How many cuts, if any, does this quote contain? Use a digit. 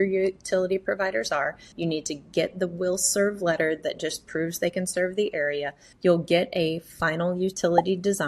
2